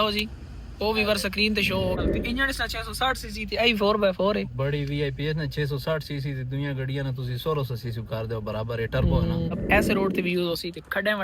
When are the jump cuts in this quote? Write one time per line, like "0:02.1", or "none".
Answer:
0:02.0
0:09.5